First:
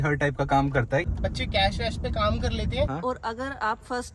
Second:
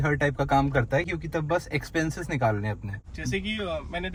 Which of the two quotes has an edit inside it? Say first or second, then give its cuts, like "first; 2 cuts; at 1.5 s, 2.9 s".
first; 2 cuts; at 1.1 s, 2.9 s